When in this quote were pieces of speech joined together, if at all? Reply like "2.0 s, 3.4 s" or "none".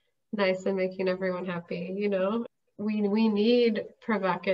2.6 s